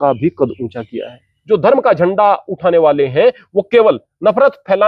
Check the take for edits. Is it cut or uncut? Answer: cut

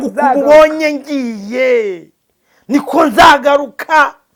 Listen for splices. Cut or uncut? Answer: uncut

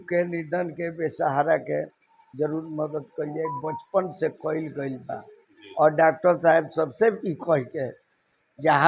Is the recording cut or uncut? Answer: uncut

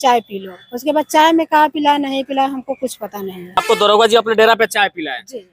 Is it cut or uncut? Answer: cut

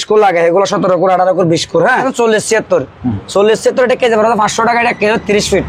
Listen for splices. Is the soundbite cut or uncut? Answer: cut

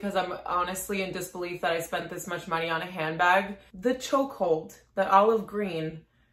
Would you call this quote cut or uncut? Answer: cut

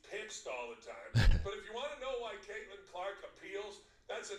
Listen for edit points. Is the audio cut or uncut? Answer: uncut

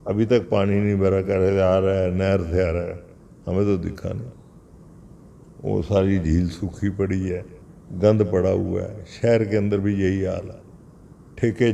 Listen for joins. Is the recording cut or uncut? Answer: uncut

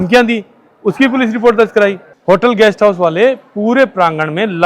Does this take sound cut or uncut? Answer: cut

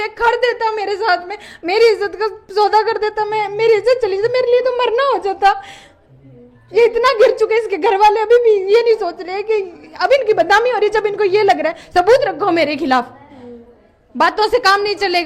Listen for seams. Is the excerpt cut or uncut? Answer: uncut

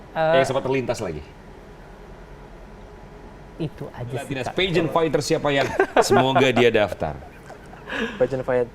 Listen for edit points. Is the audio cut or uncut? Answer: cut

